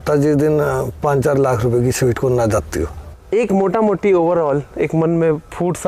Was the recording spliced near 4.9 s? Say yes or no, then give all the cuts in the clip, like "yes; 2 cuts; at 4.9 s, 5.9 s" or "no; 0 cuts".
no; 1 cut; at 3.1 s